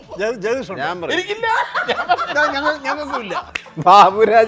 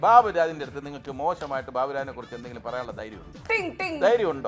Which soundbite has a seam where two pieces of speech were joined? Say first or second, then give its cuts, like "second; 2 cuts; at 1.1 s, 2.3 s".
first; 1 cut; at 3.5 s